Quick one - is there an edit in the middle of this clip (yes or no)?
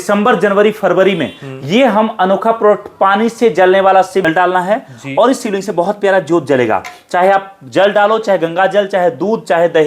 yes